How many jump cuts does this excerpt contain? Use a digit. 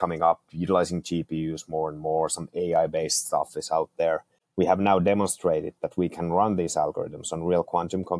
1